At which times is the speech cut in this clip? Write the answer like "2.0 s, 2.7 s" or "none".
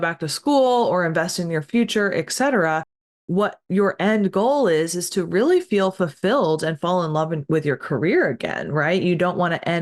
none

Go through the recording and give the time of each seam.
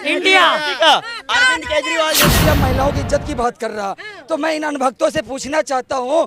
2.3 s

